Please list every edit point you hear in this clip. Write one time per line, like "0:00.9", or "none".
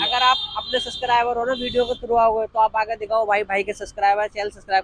none